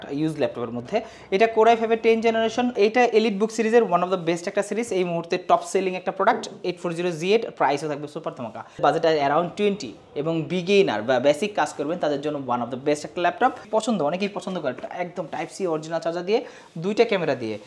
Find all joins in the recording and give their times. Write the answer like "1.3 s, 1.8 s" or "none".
2.7 s, 8.8 s, 13.6 s